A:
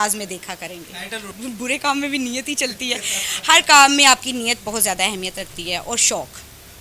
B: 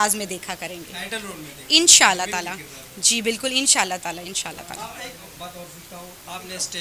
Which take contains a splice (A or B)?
A